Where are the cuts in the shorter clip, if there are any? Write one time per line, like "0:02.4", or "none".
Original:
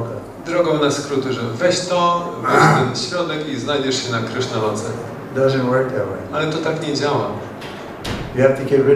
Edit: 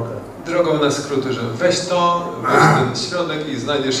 none